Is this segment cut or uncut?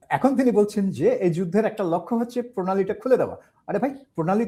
uncut